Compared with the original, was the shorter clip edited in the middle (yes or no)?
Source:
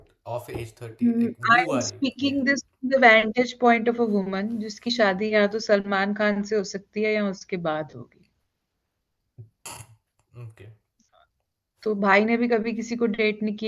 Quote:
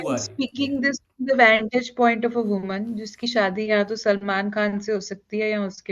no